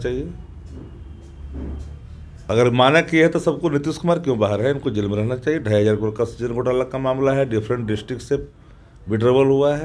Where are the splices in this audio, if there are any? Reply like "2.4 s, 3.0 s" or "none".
2.4 s